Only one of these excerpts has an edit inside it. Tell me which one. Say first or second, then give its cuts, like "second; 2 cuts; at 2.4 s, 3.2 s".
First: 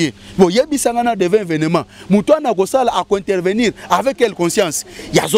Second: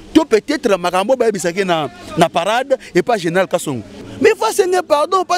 second; 1 cut; at 4.1 s